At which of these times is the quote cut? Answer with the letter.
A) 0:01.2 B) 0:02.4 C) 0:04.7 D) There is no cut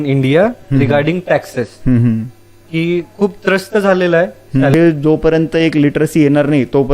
C